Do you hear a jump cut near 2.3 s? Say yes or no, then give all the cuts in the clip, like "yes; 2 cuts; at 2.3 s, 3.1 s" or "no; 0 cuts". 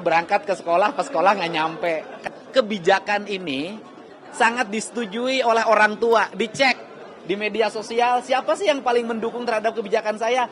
yes; 1 cut; at 2.3 s